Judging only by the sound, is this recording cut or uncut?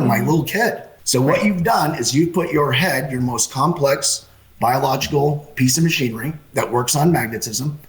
cut